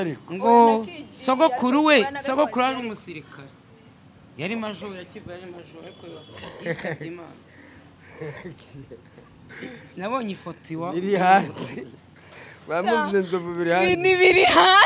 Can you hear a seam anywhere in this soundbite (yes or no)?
no